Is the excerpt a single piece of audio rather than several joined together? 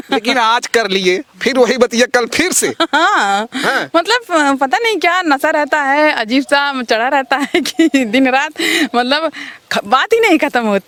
yes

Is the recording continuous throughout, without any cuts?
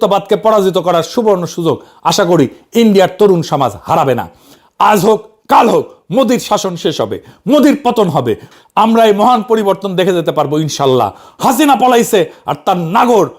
no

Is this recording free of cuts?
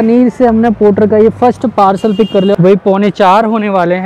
no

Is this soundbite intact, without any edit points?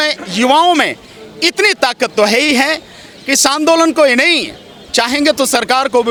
yes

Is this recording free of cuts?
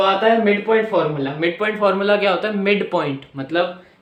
yes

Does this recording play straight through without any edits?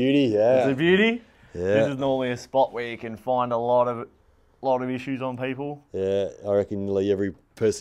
yes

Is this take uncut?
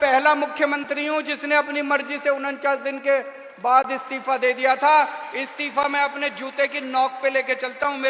yes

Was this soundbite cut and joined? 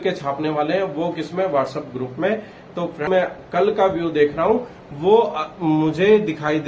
yes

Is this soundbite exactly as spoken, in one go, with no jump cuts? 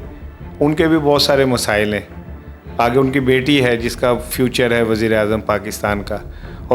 yes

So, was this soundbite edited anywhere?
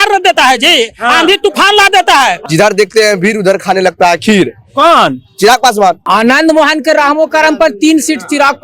yes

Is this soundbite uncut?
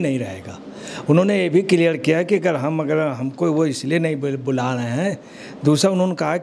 yes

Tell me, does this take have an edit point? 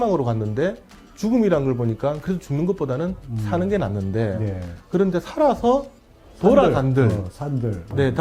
no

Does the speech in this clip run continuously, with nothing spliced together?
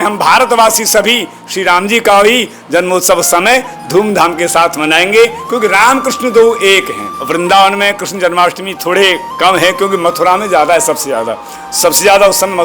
no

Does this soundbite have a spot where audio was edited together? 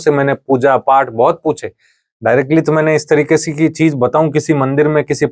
no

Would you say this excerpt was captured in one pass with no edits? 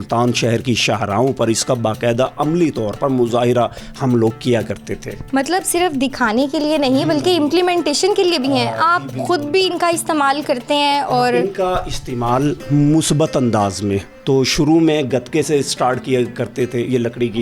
yes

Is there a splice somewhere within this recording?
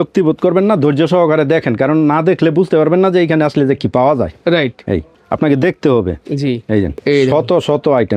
no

